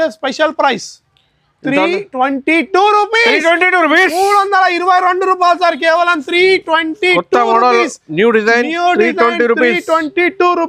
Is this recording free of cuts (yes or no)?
yes